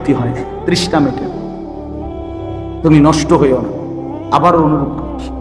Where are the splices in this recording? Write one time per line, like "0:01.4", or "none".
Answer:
none